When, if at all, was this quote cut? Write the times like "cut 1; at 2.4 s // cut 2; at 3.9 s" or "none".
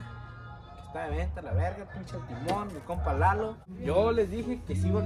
cut 1; at 3.7 s